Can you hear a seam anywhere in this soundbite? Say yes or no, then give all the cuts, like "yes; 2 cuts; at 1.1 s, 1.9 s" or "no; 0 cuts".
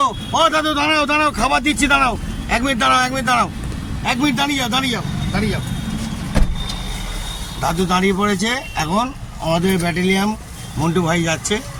no; 0 cuts